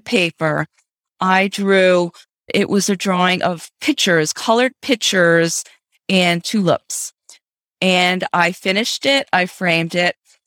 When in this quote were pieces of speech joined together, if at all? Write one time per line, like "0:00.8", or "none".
0:02.5